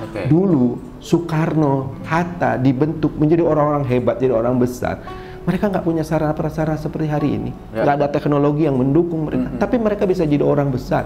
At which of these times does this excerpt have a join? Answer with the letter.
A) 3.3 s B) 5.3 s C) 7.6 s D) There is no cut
D